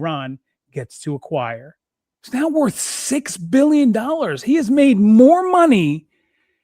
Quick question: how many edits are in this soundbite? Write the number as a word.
one